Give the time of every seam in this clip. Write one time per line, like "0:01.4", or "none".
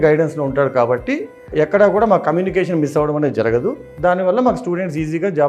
0:01.5